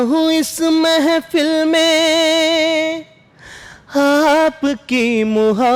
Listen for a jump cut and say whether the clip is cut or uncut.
uncut